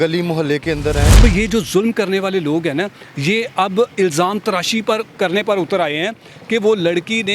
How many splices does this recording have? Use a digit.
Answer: 1